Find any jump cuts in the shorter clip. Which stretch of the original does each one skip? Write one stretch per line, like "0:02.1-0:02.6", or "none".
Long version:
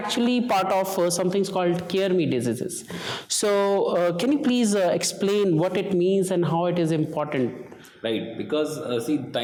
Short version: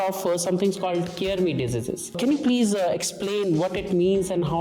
0:02.9-0:04.2